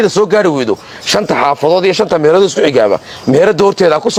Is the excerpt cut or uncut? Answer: uncut